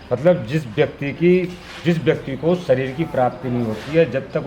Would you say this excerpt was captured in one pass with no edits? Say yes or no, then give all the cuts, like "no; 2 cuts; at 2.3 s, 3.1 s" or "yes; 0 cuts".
yes; 0 cuts